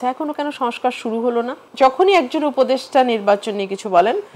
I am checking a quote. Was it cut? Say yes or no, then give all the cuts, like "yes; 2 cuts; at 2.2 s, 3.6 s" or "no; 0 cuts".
yes; 1 cut; at 1.6 s